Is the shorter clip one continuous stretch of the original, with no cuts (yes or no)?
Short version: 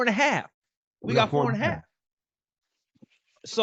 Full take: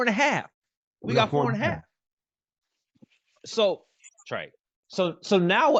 yes